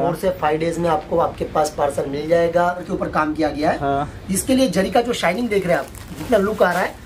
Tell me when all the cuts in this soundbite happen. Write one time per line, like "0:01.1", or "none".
0:02.9